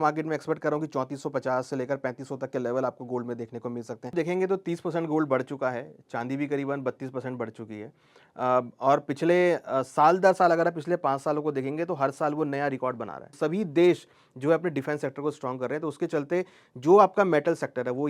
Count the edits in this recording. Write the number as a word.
two